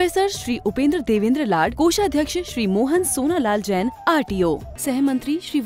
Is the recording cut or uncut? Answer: uncut